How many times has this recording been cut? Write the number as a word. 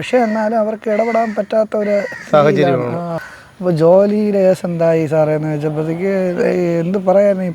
one